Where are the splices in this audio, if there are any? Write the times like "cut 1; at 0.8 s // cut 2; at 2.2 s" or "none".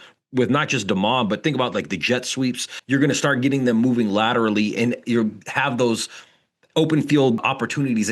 cut 1; at 2.7 s